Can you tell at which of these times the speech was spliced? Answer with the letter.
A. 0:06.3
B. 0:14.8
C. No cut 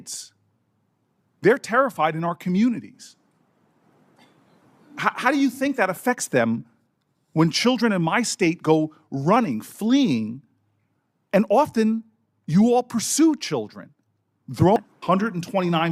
B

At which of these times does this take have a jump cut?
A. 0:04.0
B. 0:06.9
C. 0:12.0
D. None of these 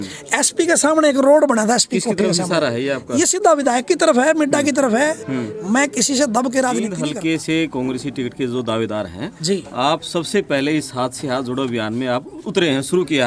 B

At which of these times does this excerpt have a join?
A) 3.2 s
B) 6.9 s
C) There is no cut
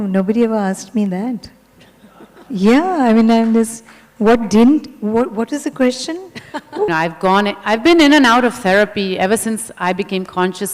B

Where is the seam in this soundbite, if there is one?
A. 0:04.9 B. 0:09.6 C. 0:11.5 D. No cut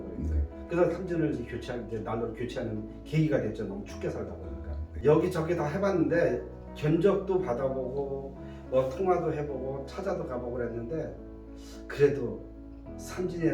A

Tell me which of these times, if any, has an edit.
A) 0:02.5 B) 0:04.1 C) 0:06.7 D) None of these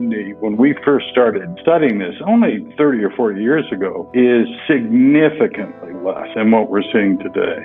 B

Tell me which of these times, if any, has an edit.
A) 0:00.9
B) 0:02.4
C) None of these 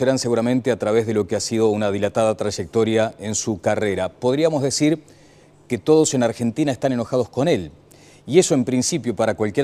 C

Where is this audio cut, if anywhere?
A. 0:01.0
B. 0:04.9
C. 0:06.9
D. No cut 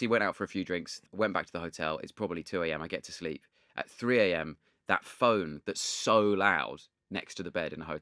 A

